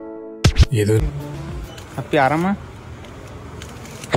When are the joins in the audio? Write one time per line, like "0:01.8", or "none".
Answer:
0:01.0